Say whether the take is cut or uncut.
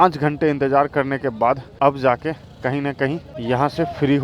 cut